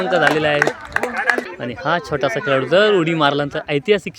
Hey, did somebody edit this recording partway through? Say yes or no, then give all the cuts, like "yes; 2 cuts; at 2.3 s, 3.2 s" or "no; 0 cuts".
yes; 1 cut; at 1.5 s